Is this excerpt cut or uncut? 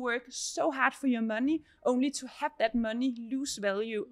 uncut